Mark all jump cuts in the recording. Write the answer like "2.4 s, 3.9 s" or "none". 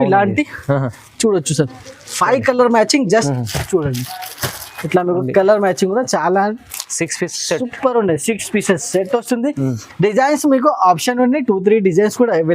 3.3 s